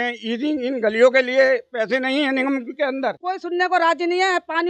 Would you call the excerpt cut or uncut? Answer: cut